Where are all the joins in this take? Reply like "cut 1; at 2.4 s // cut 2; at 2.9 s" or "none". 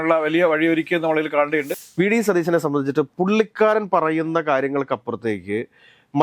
cut 1; at 1.7 s